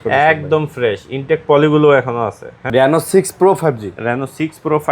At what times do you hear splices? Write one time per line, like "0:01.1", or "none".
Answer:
0:02.5